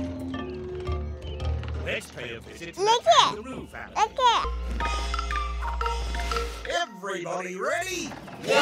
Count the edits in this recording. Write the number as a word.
one